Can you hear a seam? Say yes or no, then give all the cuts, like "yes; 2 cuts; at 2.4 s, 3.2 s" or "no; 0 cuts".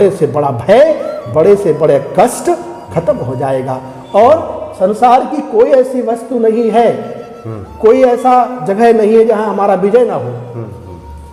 no; 0 cuts